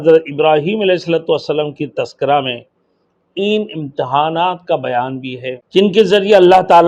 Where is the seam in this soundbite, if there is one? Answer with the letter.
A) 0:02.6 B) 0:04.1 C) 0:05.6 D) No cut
C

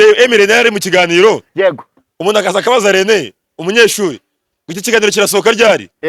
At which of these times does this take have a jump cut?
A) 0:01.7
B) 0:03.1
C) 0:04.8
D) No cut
D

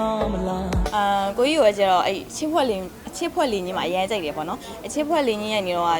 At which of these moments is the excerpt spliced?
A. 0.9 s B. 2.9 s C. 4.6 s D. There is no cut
A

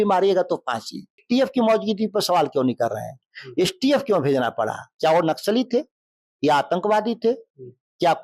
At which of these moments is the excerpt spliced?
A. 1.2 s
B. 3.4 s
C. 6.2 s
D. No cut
A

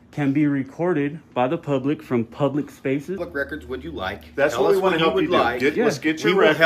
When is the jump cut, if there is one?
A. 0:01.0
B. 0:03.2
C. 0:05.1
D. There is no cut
B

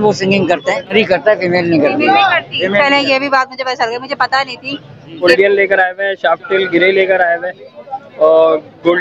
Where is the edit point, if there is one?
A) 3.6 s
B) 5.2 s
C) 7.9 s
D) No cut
B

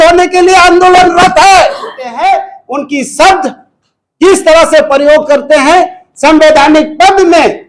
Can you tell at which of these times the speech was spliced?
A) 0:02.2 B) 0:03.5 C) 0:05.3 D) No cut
A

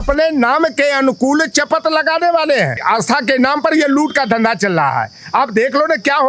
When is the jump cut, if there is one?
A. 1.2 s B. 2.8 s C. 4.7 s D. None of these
B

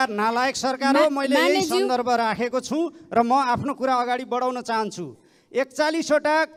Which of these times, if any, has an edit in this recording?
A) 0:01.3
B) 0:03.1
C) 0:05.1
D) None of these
D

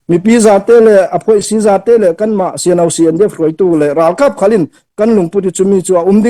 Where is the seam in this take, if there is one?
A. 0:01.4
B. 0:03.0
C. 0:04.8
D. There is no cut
D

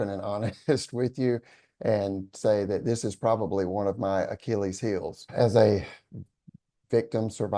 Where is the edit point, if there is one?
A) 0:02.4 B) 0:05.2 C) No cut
B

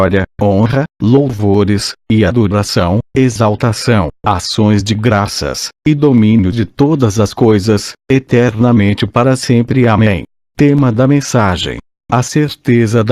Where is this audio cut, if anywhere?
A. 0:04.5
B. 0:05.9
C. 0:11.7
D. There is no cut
C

